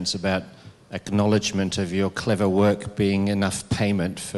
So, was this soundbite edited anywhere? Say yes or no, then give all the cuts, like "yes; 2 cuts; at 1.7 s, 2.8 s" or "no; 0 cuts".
no; 0 cuts